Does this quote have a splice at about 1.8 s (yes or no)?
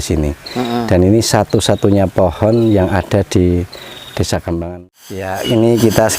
no